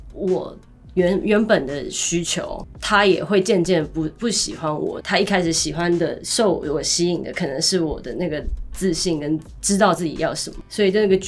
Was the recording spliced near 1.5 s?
no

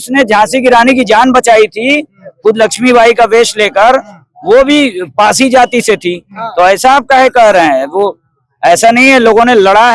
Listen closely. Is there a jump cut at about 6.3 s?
no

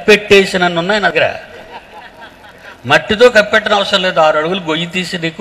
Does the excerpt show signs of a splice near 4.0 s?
no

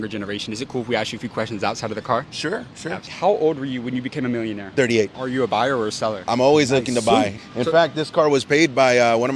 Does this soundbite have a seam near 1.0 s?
no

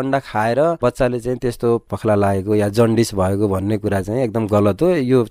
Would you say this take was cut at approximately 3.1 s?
no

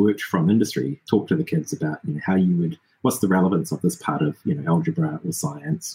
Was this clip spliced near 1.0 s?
yes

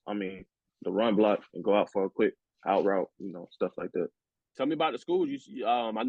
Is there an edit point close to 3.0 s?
no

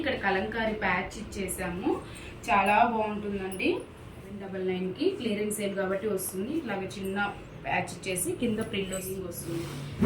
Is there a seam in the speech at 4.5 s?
yes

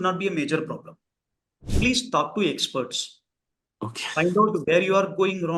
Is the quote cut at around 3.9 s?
no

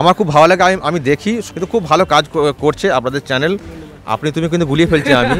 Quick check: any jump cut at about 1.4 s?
yes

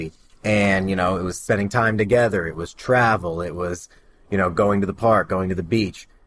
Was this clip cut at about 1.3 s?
yes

